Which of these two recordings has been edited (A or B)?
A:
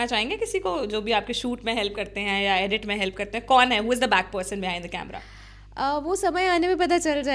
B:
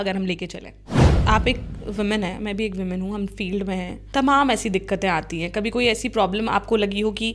B